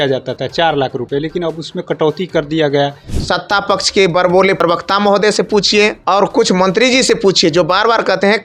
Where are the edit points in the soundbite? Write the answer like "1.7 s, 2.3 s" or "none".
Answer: 3.1 s, 4.6 s, 6.0 s